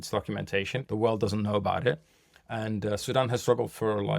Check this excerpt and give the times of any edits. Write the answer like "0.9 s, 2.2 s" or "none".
0.8 s, 3.0 s